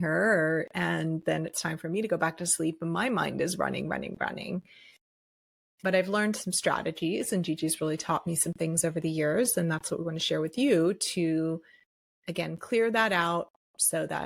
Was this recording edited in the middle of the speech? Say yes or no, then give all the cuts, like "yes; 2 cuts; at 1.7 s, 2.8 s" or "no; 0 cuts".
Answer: no; 0 cuts